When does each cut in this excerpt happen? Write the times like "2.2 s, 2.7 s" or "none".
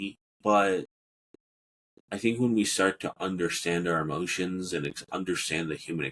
none